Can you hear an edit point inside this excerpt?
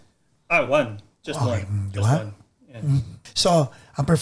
yes; 1 cut; at 3.2 s

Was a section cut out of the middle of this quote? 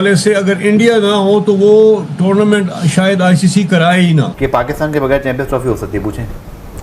yes; 1 cut; at 4.3 s

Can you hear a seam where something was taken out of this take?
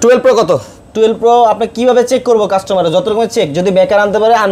no; 0 cuts

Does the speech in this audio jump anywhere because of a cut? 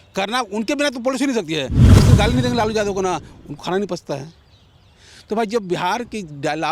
yes; 1 cut; at 1.9 s

